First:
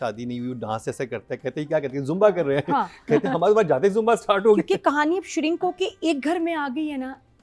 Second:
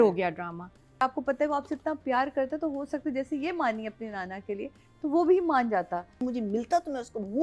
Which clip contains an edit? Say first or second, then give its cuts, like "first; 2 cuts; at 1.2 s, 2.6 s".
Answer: second; 2 cuts; at 1.0 s, 6.1 s